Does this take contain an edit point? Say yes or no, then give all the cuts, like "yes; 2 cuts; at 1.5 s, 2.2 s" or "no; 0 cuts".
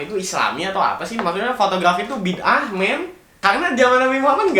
yes; 1 cut; at 3.2 s